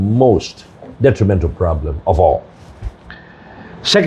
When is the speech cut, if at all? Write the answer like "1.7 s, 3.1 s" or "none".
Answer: none